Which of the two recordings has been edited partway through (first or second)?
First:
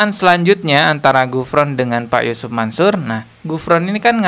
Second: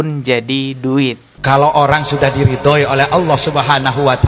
second